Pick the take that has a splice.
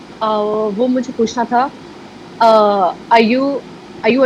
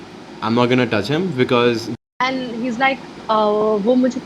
second; 1 cut; at 1.9 s

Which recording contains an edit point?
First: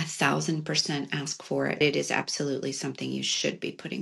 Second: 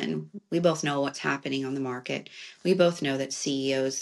first; 1 cut; at 1.8 s

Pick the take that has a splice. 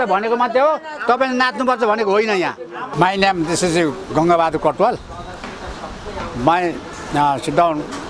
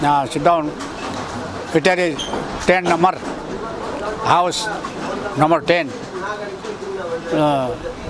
first; 1 cut; at 2.8 s

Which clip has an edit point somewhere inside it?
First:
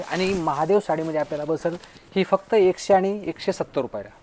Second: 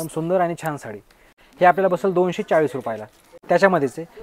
second; 2 cuts; at 1.3 s, 3.3 s

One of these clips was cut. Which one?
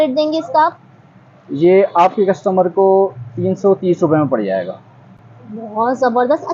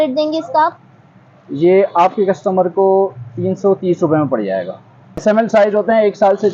second; 1 cut; at 5.2 s

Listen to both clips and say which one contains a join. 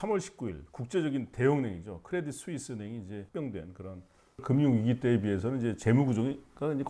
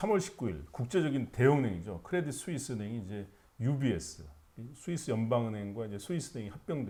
first; 2 cuts; at 3.2 s, 4.4 s

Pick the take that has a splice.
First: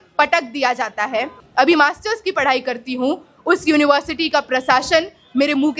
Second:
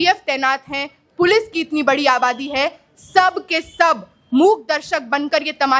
first; 1 cut; at 1.4 s

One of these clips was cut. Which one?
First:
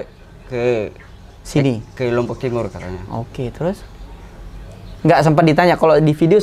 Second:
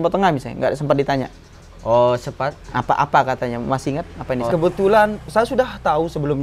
second; 1 cut; at 4.5 s

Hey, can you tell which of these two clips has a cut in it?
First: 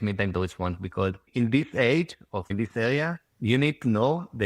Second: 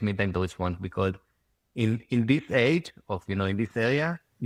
first; 2 cuts; at 1.3 s, 2.5 s

